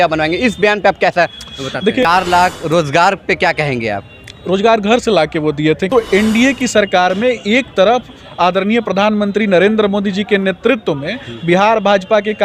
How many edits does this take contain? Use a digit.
2